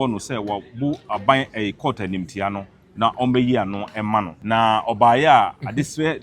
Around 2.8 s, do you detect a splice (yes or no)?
no